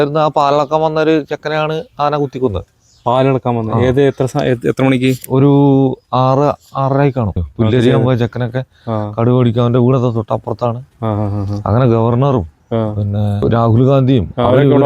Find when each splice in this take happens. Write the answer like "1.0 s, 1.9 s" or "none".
7.4 s, 13.4 s